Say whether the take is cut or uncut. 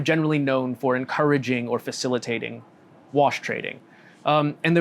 uncut